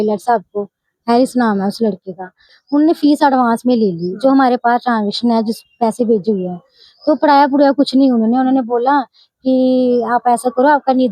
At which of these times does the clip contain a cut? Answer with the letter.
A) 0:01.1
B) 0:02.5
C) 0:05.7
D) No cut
B